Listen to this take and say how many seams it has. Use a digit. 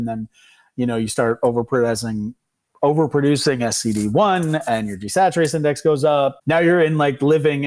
1